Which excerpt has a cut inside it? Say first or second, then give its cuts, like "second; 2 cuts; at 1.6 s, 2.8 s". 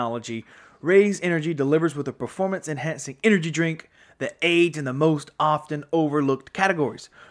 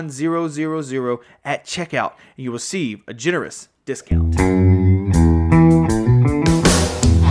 second; 1 cut; at 4.0 s